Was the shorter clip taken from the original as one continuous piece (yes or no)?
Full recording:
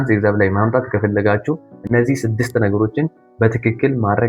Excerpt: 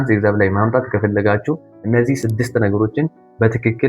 yes